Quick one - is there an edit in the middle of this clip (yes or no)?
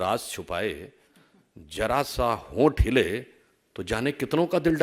no